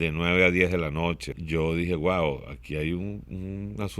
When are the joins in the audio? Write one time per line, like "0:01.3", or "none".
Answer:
0:01.3